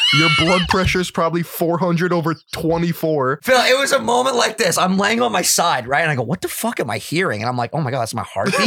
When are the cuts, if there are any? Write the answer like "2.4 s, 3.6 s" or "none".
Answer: 3.4 s